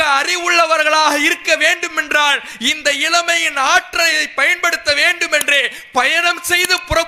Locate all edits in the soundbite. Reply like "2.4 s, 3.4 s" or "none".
none